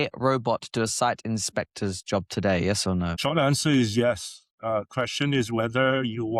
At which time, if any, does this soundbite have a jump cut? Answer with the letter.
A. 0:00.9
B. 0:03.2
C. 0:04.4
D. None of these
B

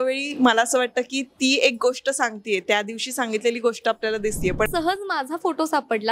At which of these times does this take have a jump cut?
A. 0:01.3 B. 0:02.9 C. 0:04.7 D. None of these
C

